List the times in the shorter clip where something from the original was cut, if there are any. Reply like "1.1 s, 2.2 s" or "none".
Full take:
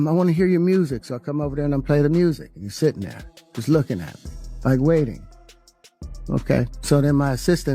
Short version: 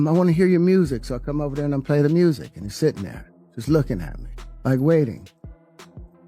none